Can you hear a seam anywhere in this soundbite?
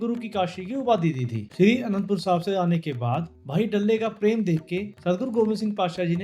no; 0 cuts

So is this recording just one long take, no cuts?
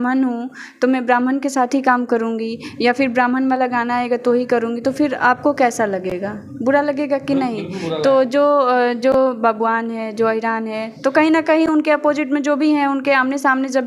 yes; 0 cuts

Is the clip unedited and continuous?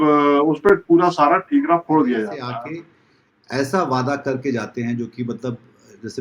no; 1 cut; at 2.4 s

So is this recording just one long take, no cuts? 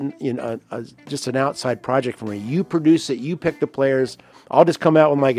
yes; 0 cuts

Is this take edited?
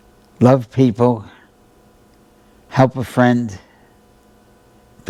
no; 0 cuts

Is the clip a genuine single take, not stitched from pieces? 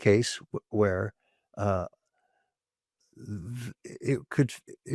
yes; 0 cuts

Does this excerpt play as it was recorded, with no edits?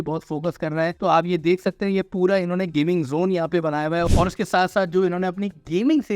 no; 2 cuts; at 0.9 s, 4.1 s

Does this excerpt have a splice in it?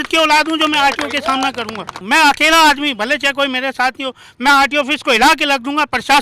yes; 1 cut; at 2.0 s

